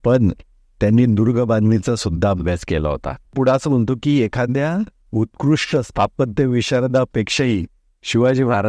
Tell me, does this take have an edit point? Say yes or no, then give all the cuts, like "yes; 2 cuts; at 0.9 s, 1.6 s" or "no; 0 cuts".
yes; 2 cuts; at 3.3 s, 7.1 s